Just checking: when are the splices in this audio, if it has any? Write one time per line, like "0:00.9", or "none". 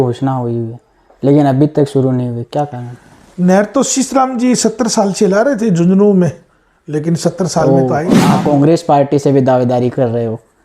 0:08.1